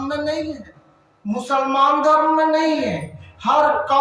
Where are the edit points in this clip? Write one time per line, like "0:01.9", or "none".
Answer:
none